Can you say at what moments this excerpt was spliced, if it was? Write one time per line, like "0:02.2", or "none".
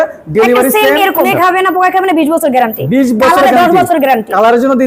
0:01.3

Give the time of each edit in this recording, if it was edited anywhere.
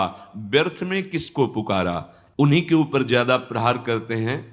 0:02.4

